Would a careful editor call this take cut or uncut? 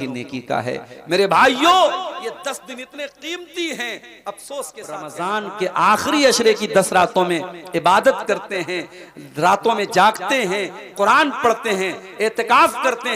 cut